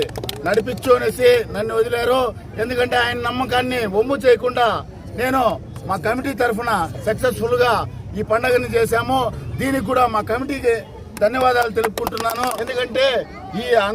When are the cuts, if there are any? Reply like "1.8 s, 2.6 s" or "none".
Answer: 12.6 s